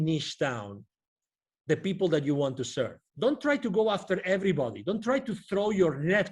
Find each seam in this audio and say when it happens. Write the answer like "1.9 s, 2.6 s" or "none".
3.0 s